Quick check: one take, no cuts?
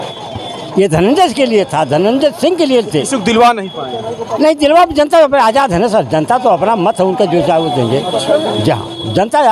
yes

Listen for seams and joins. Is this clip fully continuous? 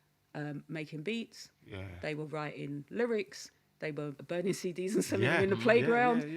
no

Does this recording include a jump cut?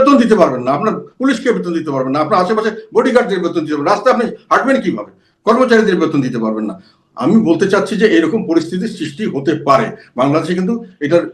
no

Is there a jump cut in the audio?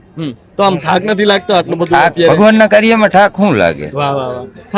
no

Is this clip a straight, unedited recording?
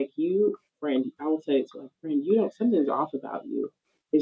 yes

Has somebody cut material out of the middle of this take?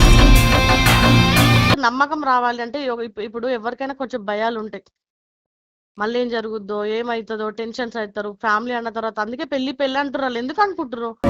yes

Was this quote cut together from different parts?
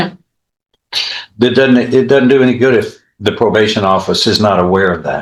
no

